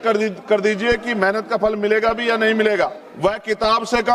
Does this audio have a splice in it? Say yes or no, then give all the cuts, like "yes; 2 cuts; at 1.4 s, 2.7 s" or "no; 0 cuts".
yes; 1 cut; at 3.0 s